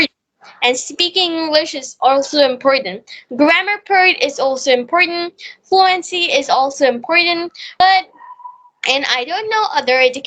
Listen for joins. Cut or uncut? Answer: cut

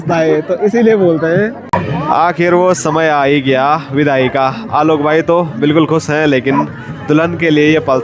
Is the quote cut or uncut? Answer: cut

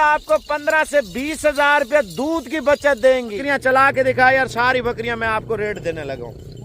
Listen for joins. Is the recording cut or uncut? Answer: cut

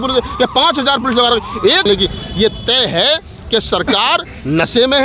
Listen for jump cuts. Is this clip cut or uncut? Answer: cut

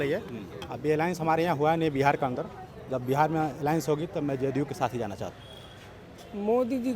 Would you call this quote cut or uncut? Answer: cut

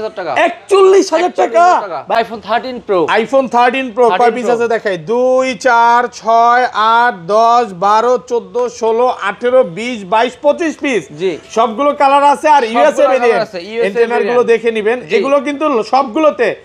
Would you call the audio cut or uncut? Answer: cut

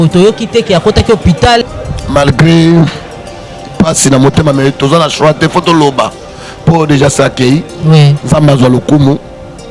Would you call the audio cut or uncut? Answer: cut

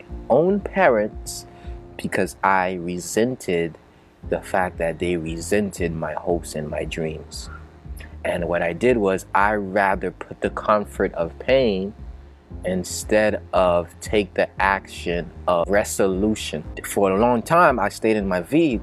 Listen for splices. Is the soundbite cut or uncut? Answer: cut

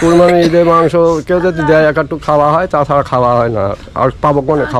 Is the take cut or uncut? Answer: uncut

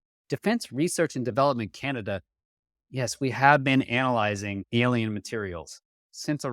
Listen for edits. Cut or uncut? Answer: cut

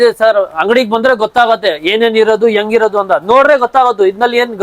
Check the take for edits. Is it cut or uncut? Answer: uncut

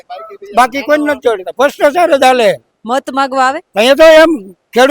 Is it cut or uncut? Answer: cut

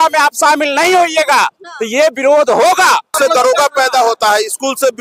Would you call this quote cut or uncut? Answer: cut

